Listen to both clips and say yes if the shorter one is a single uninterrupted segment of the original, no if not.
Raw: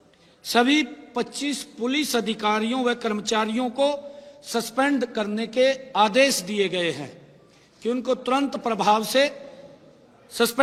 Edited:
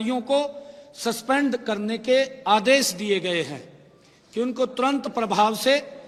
yes